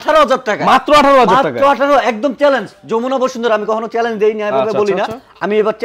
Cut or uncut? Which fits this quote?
uncut